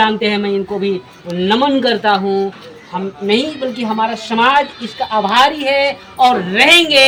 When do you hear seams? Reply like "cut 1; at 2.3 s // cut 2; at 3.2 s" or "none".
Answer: none